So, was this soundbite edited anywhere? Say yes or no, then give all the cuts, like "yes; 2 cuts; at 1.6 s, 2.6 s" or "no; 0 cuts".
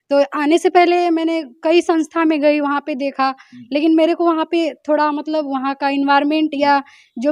no; 0 cuts